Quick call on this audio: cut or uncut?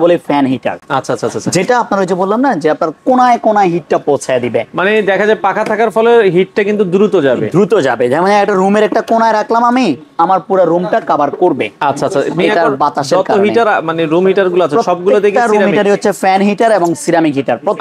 uncut